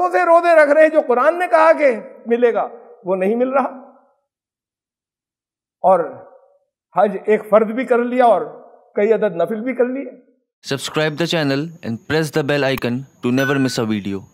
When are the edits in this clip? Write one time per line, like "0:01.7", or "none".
0:10.8